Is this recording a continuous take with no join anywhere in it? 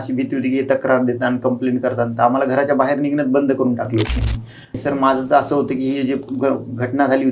no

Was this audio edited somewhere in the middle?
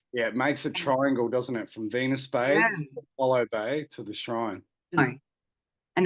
yes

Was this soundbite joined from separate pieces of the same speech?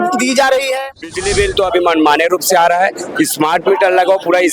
yes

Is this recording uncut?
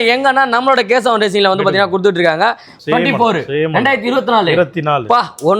no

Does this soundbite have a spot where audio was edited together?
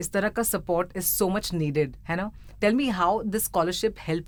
no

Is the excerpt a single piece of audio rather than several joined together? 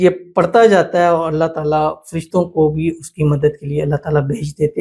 yes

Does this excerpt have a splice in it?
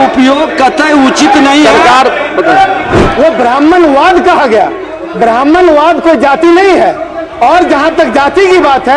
yes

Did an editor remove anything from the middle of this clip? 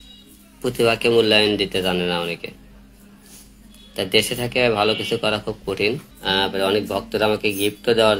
yes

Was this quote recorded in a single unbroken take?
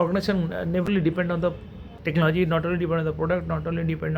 no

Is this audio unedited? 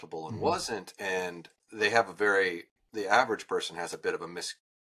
yes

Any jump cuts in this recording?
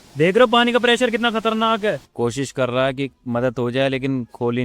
yes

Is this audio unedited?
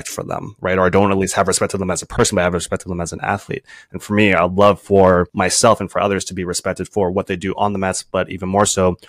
no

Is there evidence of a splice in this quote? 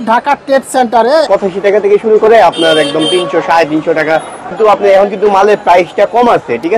yes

